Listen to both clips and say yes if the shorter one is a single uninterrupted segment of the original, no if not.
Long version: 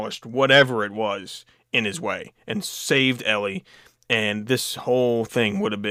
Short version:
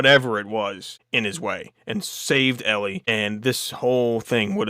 no